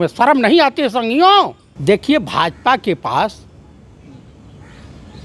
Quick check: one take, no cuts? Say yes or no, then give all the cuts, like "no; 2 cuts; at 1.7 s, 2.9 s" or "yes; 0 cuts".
no; 1 cut; at 1.7 s